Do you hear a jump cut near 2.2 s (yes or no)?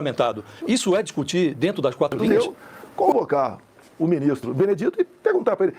yes